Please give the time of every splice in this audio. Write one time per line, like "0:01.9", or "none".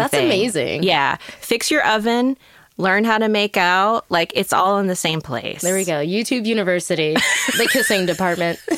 none